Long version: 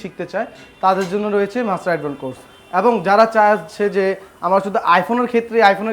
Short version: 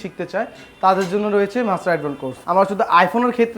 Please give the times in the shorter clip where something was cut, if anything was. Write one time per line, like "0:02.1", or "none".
0:02.3